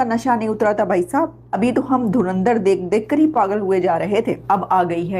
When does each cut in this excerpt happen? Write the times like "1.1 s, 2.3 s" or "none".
1.4 s, 4.4 s

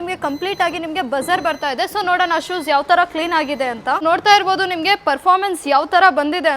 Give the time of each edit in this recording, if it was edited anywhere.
none

